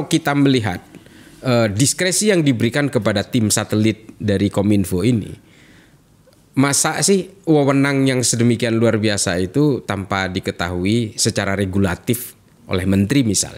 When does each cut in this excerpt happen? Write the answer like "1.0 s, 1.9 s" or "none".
none